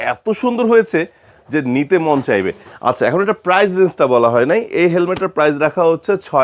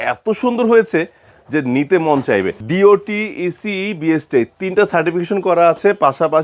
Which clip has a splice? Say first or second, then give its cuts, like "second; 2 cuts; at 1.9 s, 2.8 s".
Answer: second; 1 cut; at 2.6 s